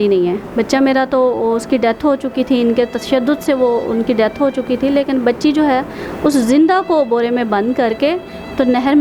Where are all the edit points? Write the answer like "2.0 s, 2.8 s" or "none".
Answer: none